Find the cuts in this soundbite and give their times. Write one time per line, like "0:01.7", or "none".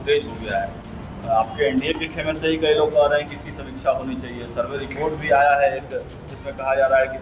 none